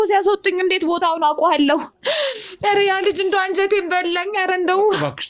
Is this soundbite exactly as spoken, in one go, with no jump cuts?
yes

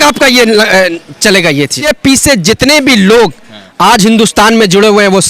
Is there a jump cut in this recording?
yes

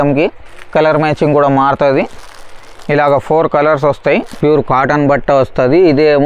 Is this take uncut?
no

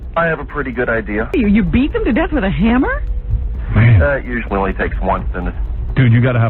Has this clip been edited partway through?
yes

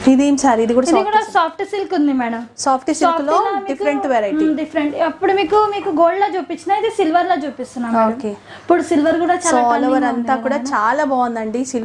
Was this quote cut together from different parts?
no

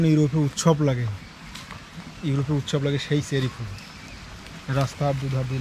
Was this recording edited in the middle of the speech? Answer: no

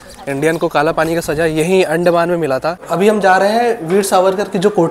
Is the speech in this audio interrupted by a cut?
yes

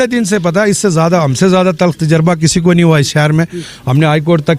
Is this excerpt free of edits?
yes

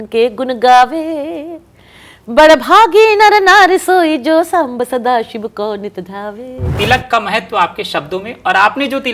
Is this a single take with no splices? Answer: no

